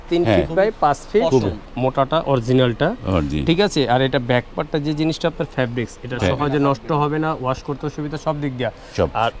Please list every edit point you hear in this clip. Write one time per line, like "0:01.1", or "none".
0:01.6

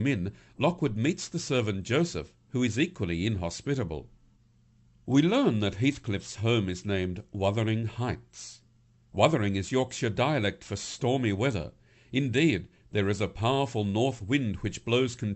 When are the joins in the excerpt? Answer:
0:13.7

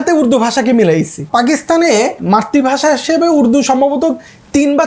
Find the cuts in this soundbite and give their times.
0:01.3
0:02.2

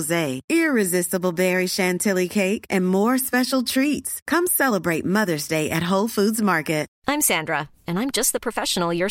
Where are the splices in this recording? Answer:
0:06.9

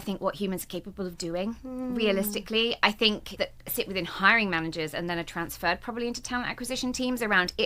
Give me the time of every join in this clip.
none

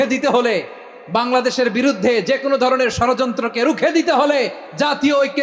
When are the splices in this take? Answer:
none

